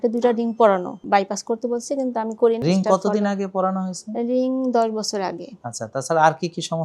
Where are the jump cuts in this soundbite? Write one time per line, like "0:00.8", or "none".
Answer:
0:01.0
0:02.6